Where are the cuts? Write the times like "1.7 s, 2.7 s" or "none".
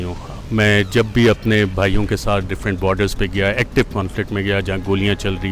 none